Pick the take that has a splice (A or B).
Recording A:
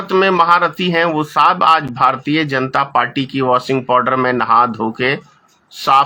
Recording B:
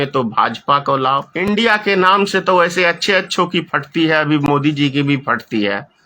B